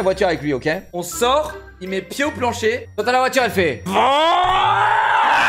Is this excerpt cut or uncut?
cut